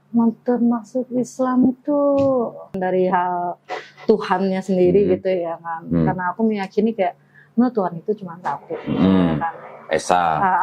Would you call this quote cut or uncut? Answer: cut